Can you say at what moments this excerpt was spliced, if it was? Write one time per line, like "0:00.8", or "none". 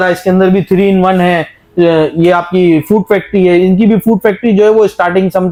none